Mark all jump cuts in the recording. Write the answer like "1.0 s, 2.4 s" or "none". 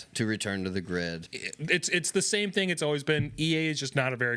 1.2 s